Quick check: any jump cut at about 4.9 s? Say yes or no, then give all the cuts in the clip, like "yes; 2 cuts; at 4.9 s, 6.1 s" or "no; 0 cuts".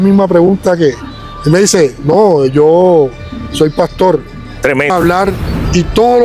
yes; 1 cut; at 4.9 s